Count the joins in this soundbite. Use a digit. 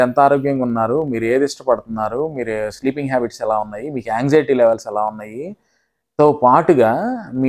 0